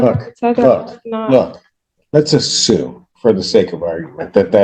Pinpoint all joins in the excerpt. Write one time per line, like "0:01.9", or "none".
none